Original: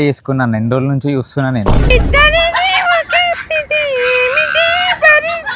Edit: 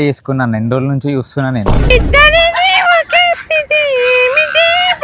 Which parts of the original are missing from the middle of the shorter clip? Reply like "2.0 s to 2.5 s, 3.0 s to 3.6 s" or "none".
none